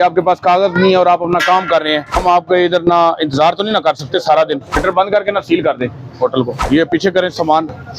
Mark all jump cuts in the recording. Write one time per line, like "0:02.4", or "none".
0:02.2
0:04.8
0:06.6